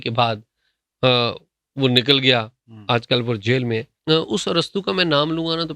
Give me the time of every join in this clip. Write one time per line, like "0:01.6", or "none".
0:03.9